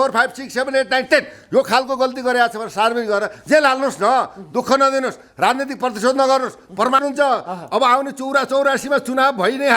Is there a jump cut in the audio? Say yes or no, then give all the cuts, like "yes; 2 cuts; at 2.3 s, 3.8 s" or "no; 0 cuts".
yes; 1 cut; at 7.0 s